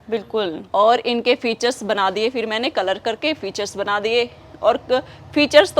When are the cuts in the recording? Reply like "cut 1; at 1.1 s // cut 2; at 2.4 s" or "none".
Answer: none